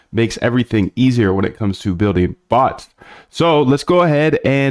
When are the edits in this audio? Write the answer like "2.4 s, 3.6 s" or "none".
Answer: 3.6 s